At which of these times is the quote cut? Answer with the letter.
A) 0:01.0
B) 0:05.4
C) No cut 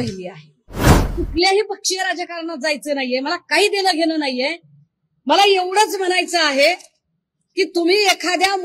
A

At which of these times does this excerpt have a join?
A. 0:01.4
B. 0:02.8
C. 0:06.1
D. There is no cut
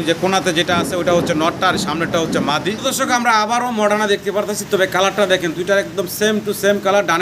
B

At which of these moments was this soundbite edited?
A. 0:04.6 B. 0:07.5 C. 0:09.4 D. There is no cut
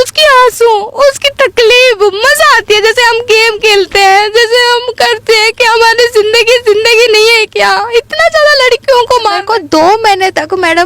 C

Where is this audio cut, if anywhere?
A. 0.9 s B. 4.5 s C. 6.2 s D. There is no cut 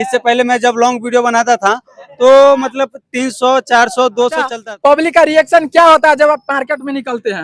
B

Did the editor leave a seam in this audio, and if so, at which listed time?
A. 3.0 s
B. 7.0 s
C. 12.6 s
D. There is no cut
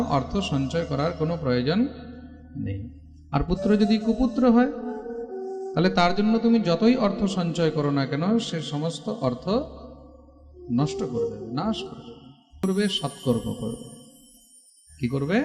C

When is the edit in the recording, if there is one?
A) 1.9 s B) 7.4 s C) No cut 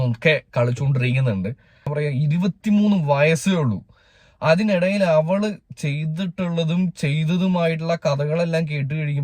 A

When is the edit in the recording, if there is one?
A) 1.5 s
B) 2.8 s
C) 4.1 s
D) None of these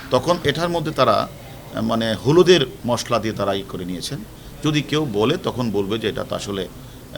B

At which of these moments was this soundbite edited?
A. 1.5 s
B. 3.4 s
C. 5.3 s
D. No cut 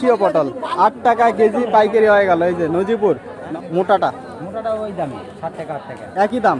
B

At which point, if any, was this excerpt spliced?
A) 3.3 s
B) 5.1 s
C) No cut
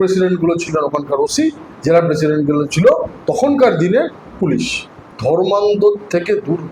B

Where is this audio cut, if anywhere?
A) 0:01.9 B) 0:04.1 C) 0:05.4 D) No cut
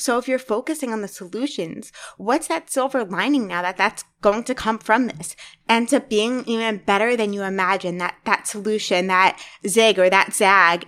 C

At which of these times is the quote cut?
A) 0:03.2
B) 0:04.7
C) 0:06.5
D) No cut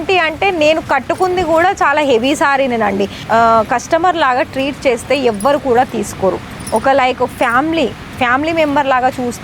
A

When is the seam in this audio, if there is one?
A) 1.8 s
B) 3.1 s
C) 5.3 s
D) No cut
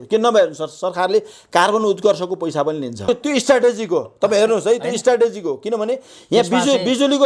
B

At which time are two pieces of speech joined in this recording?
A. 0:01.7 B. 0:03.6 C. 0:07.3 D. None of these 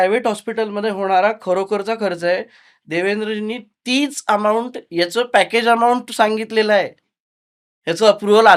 D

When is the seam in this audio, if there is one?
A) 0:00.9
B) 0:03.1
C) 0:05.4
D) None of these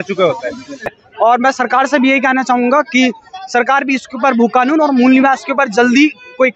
A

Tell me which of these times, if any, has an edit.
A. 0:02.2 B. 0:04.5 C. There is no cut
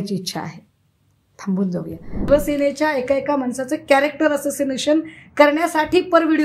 A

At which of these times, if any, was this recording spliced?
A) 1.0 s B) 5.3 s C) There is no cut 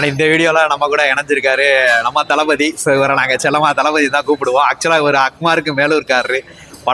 C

